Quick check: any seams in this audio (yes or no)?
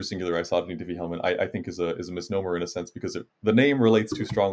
no